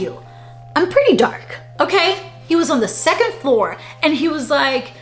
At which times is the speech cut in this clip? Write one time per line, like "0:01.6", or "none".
0:02.3